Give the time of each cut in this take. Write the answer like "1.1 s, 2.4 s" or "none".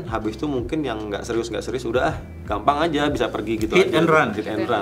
none